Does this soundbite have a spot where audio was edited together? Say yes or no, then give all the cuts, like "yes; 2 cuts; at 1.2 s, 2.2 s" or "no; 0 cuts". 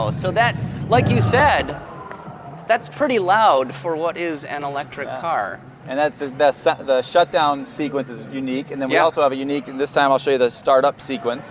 no; 0 cuts